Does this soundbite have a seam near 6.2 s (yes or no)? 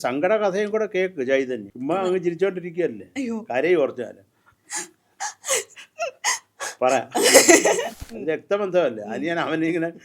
no